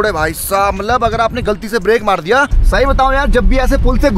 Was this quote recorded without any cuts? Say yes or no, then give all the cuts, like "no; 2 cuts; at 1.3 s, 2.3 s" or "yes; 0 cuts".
no; 1 cut; at 2.6 s